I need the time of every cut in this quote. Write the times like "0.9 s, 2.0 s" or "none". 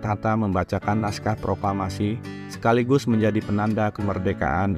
none